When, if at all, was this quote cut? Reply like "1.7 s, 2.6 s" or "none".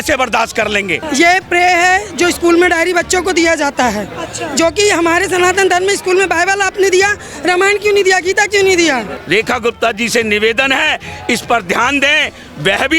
1.0 s, 9.1 s